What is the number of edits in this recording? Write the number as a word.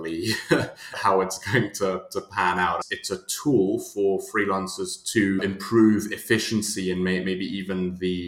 three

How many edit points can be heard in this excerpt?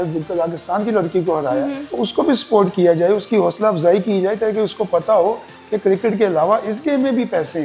one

